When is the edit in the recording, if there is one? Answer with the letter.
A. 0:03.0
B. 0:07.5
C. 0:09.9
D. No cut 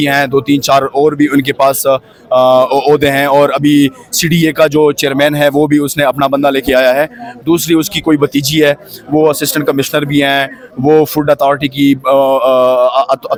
D